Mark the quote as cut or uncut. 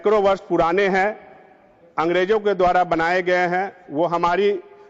uncut